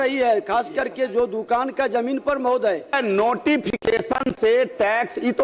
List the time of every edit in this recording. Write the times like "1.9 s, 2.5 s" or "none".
3.0 s